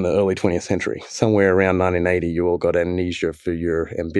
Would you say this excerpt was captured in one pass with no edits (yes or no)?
yes